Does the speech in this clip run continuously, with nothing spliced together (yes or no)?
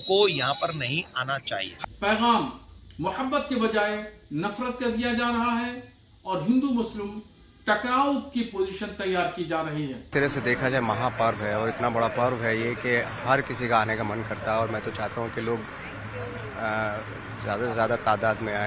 no